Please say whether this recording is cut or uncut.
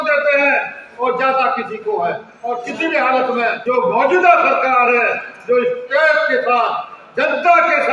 cut